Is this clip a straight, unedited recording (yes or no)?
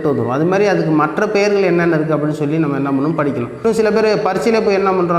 no